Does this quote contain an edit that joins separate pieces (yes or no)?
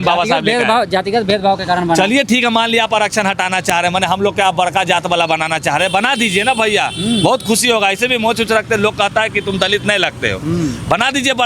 no